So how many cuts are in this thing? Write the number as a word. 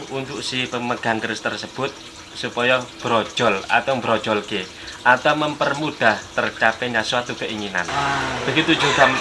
one